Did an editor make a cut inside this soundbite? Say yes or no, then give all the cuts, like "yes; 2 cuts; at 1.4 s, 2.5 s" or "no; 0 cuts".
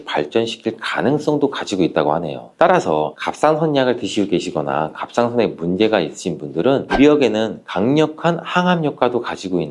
yes; 1 cut; at 6.9 s